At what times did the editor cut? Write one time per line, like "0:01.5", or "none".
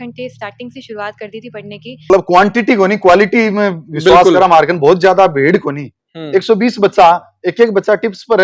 0:02.1